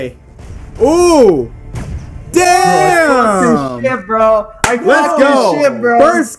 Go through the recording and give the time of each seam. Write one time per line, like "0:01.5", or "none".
none